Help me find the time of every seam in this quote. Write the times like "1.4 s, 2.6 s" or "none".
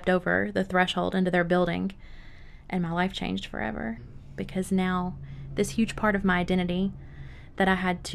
4.2 s